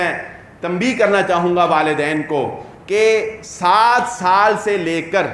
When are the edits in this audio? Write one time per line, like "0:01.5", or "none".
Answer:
none